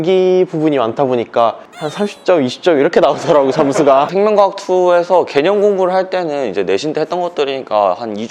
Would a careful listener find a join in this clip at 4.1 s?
yes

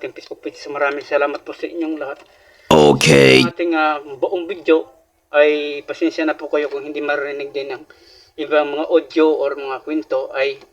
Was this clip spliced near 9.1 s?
no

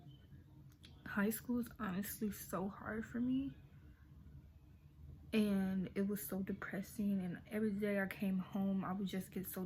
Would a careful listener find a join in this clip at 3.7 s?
no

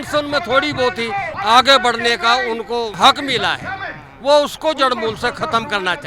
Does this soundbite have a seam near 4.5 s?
no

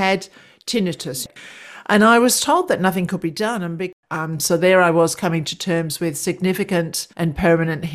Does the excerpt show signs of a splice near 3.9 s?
yes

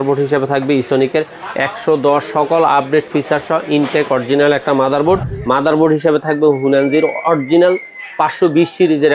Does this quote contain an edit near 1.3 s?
no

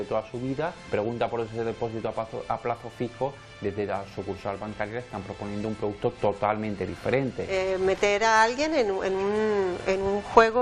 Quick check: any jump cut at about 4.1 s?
no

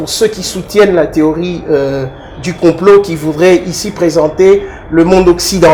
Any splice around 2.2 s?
no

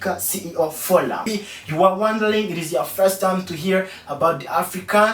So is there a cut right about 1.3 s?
yes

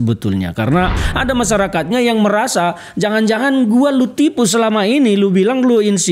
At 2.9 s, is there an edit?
no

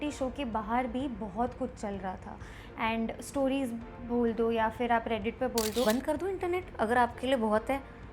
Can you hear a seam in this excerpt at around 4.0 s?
no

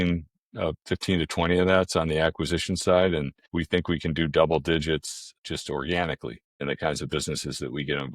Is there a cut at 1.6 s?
no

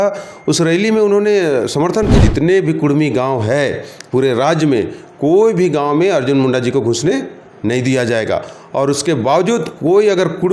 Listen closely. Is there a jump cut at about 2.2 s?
yes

